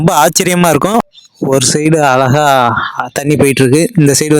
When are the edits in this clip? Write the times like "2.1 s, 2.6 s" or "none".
1.0 s